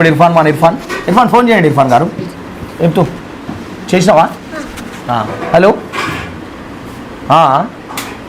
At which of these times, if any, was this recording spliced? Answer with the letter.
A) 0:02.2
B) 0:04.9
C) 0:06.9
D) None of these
A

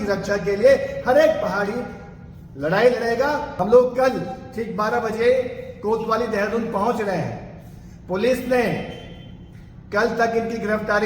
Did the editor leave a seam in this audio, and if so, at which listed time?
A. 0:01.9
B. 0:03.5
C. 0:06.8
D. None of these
B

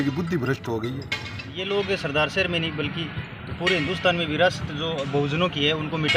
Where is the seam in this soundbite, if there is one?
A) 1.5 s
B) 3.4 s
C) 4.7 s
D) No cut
A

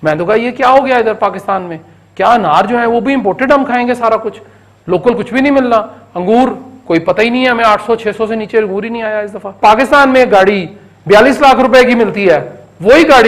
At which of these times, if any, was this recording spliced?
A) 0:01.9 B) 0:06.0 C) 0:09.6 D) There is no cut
C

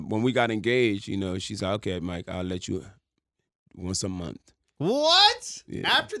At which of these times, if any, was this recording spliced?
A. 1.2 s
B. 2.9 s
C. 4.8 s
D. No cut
D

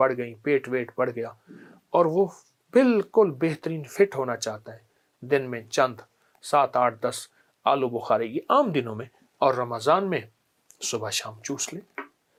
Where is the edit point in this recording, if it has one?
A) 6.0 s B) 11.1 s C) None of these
C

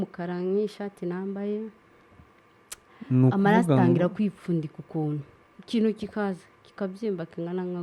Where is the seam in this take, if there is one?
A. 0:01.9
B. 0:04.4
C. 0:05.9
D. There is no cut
D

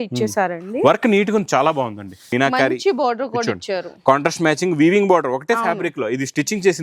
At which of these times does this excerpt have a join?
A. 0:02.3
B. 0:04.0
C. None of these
A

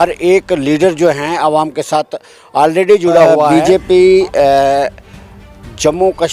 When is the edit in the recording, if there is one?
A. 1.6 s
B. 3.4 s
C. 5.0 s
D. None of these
B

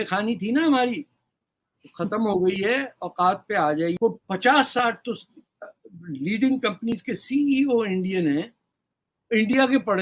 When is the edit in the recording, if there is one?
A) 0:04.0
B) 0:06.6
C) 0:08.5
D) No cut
A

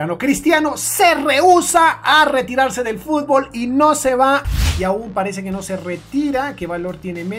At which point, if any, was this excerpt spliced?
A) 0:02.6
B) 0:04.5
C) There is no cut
B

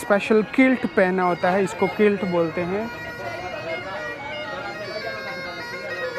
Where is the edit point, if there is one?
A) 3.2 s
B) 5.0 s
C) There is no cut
C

